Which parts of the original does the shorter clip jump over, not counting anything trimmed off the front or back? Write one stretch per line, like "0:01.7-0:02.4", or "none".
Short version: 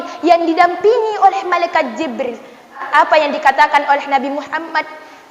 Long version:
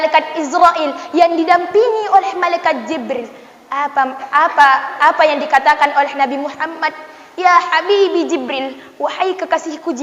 0:03.7-0:04.9